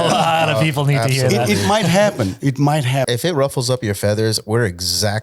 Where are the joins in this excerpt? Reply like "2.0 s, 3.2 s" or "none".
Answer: 3.1 s